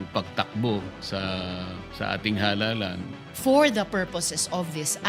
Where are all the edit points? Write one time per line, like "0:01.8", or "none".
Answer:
0:01.3
0:03.3